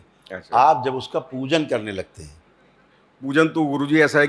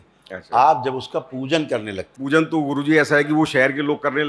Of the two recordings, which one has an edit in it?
second; 1 cut; at 2.1 s

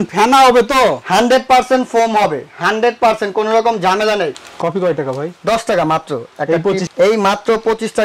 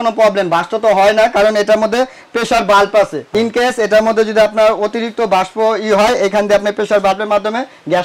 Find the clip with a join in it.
first; 1 cut; at 4.3 s

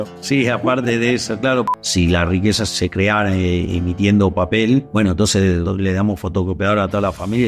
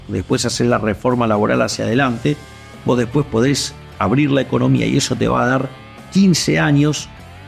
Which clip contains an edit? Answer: first; 3 cuts; at 1.7 s, 2.7 s, 5.3 s

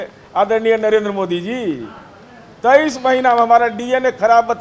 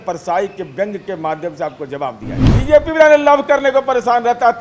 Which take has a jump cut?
second; 1 cut; at 2.4 s

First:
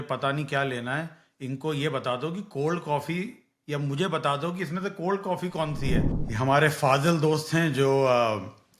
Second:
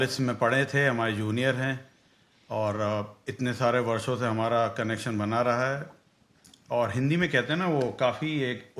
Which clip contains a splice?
first; 1 cut; at 6.1 s

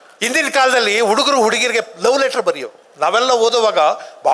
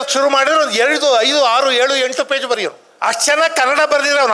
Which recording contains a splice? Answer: second; 1 cut; at 2.9 s

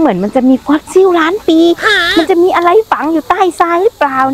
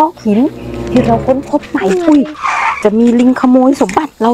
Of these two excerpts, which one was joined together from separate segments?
second; 1 cut; at 2.7 s

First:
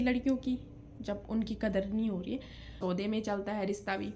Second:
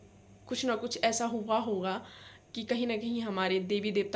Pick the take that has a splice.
first; 1 cut; at 2.8 s

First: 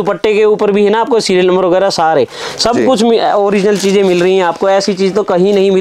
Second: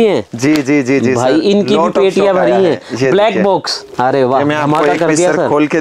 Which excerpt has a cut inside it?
second; 1 cut; at 3.8 s

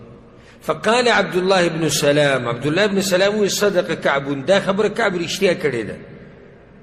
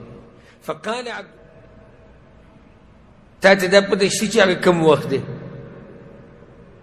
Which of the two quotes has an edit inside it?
second; 1 cut; at 1.2 s

